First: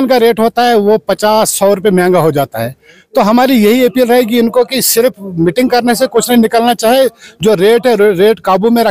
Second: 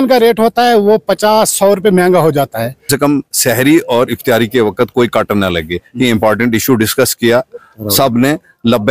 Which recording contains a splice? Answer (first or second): second